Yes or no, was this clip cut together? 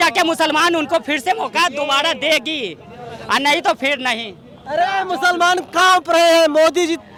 no